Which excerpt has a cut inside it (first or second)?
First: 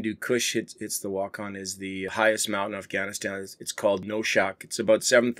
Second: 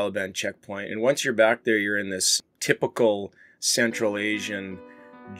first